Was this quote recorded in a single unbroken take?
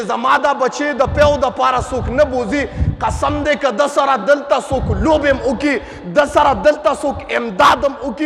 yes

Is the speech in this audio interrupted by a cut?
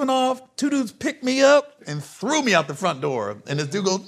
yes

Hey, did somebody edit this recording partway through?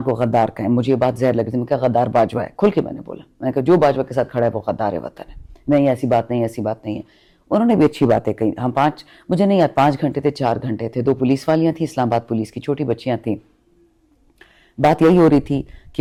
no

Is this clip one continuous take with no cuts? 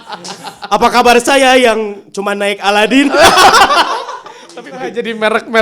no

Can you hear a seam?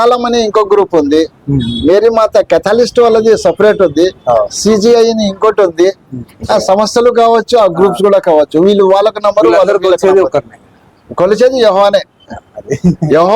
yes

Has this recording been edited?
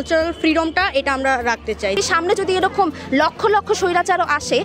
yes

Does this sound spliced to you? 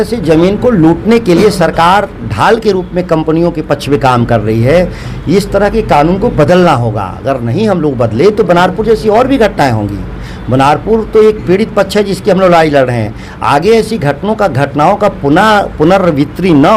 no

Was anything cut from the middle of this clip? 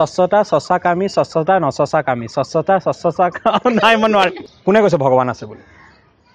yes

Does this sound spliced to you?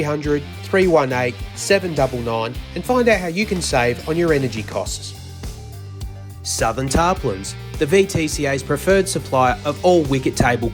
no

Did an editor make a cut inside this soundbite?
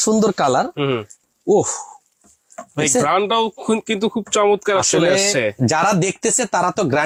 no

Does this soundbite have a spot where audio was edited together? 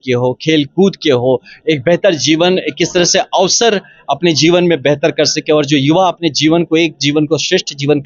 no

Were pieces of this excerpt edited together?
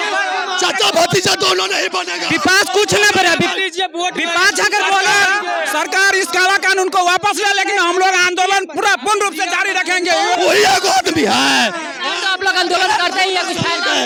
no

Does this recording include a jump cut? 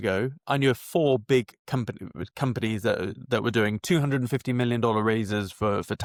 no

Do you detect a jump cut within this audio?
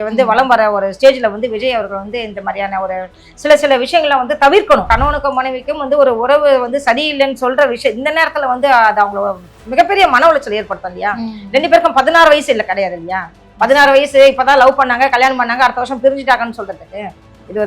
yes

